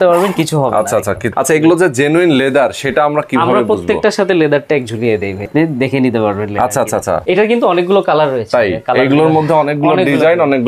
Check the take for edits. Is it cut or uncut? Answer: cut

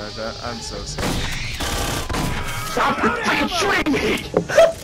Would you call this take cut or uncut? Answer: uncut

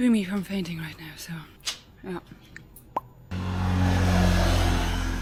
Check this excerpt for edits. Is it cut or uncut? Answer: uncut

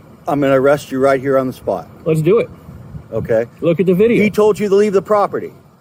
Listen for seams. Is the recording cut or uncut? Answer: uncut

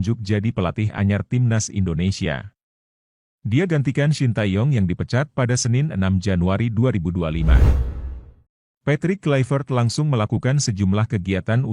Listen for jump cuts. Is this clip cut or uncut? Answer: uncut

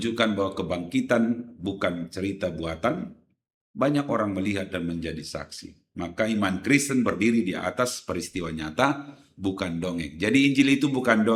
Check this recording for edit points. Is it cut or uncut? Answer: uncut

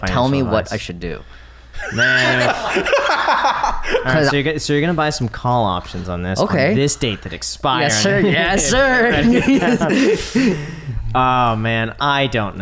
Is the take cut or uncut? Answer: uncut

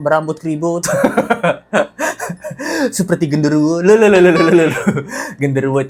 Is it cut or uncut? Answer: uncut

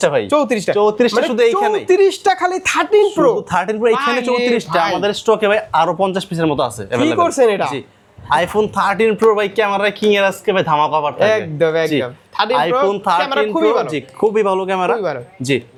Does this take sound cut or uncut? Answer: uncut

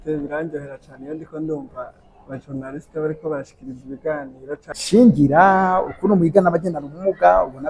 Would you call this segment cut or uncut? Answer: cut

